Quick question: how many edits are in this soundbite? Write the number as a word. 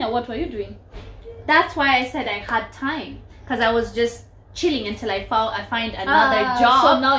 zero